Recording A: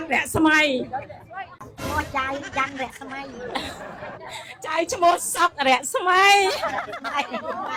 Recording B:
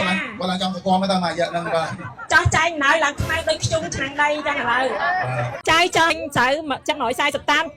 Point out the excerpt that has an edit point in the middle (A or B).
B